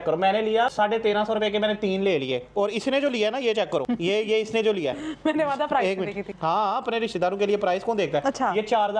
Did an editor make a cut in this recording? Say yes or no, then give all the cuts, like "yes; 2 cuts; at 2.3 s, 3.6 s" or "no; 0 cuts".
no; 0 cuts